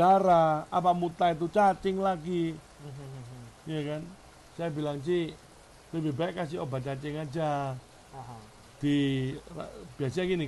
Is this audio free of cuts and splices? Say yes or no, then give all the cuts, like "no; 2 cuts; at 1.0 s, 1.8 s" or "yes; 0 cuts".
yes; 0 cuts